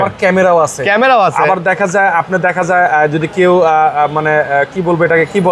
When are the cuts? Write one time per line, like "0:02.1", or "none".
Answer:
none

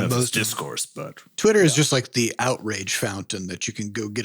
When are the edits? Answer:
0:01.2

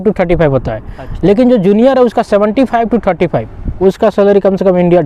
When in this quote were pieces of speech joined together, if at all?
0:03.6

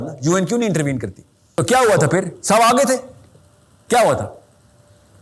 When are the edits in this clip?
0:01.4

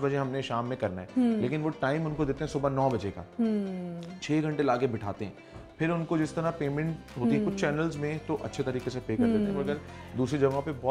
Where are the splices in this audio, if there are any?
none

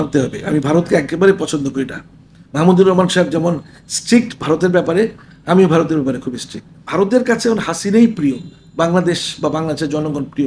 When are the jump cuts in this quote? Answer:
0:06.8

